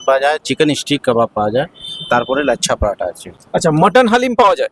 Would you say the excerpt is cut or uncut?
uncut